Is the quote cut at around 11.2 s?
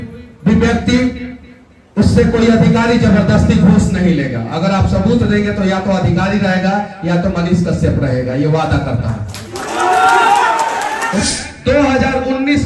yes; 1 cut; at 11.2 s

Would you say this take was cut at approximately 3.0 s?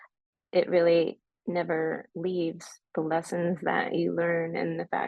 no; 1 cut; at 1.3 s

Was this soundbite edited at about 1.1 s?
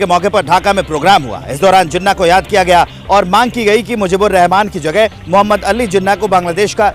no; 0 cuts

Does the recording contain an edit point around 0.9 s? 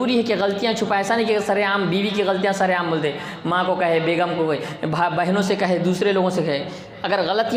no; 0 cuts

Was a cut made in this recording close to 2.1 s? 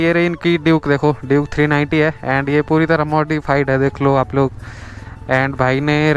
no; 0 cuts

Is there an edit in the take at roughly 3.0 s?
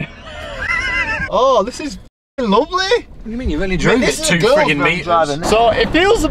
no; 1 cut; at 1.3 s

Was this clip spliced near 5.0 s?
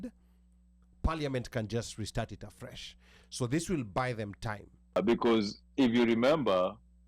yes; 1 cut; at 5.0 s

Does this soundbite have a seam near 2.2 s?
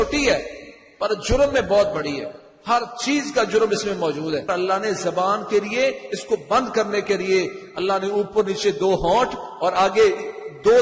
no; 1 cut; at 4.5 s

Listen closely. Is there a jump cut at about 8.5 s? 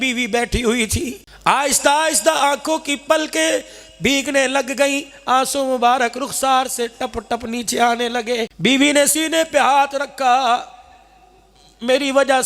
yes; 2 cuts; at 1.2 s, 8.5 s

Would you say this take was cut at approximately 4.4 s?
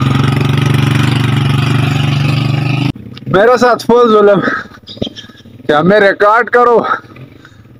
no; 1 cut; at 2.9 s

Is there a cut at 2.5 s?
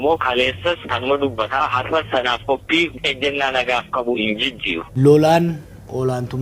no; 1 cut; at 4.9 s

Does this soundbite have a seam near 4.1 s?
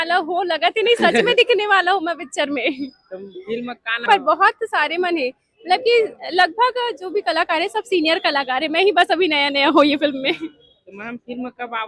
yes; 1 cut; at 4.1 s

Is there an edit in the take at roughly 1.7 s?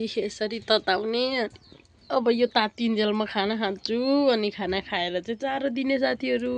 no; 0 cuts

